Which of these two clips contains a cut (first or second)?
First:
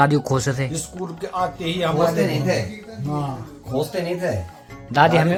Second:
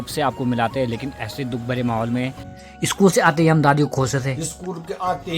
second